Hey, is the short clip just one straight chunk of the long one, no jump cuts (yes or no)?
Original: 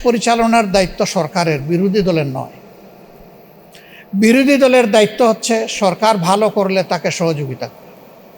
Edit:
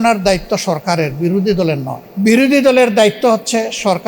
no